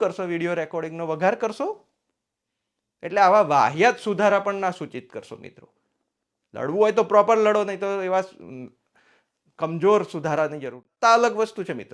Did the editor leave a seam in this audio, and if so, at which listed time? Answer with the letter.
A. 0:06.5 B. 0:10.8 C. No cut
B